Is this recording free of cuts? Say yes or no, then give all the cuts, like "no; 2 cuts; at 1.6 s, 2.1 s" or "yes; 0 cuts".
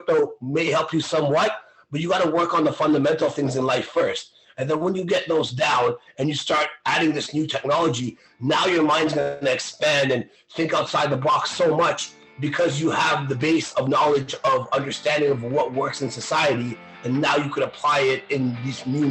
yes; 0 cuts